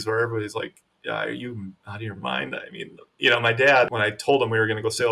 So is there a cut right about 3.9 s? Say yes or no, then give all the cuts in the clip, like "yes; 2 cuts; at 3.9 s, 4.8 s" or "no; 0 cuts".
yes; 1 cut; at 3.9 s